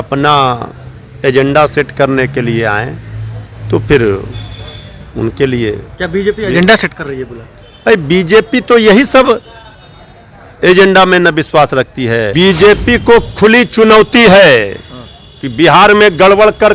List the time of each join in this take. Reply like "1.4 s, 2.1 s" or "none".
12.3 s